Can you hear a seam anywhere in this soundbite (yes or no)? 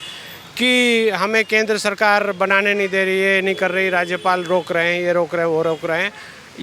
no